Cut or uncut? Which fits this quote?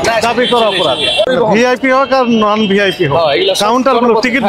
cut